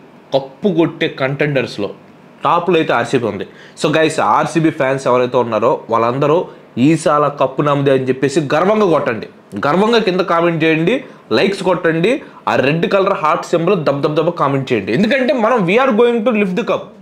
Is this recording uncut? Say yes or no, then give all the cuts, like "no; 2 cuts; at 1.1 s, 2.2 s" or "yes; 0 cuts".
yes; 0 cuts